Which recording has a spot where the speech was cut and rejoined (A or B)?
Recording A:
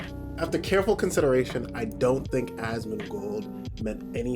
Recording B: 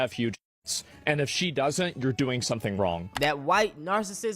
B